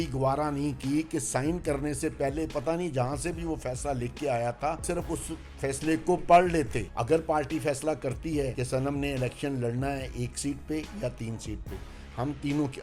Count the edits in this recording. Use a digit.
3